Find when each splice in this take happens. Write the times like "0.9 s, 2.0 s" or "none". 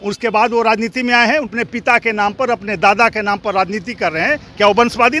1.6 s